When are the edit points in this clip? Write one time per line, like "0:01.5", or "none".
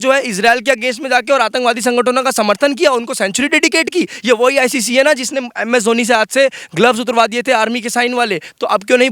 none